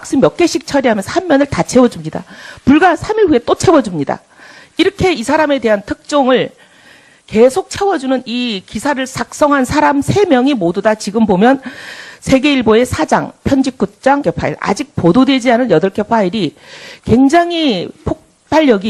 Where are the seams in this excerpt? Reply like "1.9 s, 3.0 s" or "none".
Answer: none